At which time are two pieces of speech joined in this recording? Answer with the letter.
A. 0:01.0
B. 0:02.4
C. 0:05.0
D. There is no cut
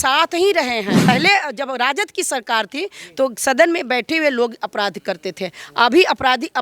A